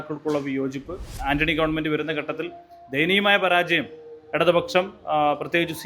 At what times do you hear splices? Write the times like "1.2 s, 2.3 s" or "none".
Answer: 1.2 s